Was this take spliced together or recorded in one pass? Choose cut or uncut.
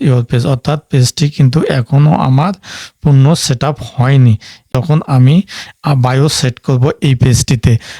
cut